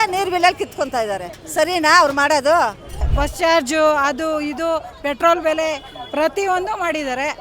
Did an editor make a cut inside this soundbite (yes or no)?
yes